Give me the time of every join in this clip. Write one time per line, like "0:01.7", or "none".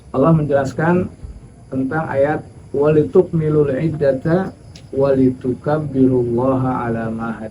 0:02.5